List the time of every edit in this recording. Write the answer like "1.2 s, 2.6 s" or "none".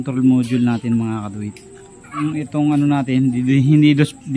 2.2 s